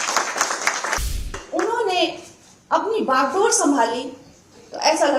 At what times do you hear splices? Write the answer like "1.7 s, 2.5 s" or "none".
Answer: 1.4 s

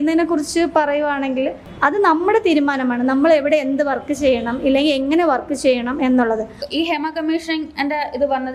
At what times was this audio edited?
1.6 s, 6.6 s

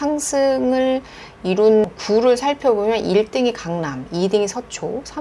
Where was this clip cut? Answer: 2.0 s

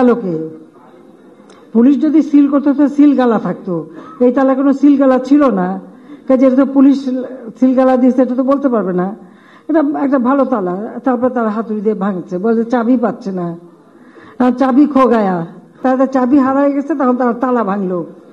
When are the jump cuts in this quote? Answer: 15.8 s

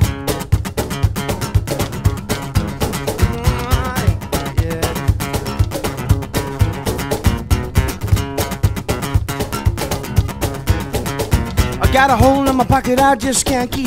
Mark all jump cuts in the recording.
none

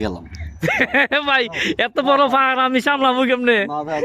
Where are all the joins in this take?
none

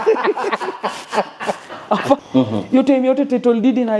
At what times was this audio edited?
2.2 s

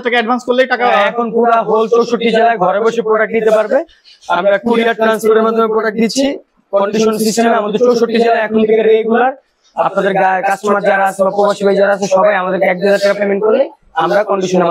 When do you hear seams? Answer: none

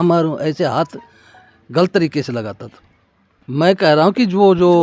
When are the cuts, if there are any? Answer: 3.3 s

